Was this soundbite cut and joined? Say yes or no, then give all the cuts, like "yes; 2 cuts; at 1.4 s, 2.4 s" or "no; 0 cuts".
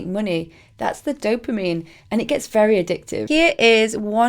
yes; 1 cut; at 3.2 s